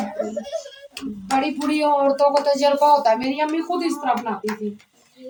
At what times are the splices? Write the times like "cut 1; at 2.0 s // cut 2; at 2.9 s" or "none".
none